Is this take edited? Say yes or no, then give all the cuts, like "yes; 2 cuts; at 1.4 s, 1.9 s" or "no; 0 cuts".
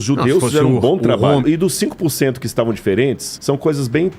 yes; 2 cuts; at 1.4 s, 3.3 s